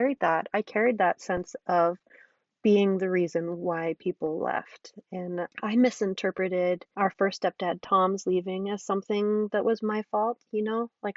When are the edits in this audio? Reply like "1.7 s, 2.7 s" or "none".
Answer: 5.5 s, 6.9 s